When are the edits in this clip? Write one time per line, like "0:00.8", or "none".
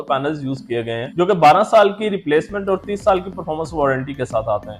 none